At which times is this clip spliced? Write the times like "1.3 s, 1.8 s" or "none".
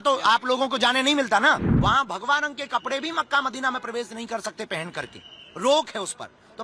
1.7 s